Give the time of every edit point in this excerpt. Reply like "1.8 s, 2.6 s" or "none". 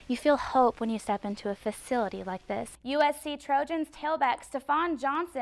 2.7 s